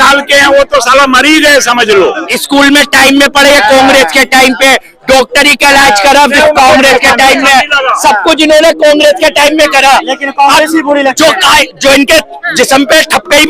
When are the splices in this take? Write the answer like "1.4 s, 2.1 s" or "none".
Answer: 2.3 s